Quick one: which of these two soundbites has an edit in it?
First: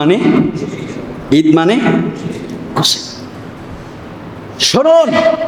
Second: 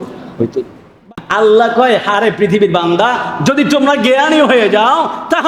second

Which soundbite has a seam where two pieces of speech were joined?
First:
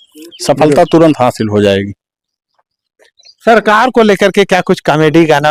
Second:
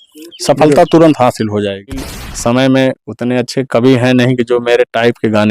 second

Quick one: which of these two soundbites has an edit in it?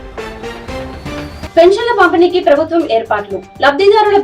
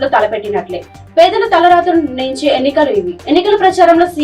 first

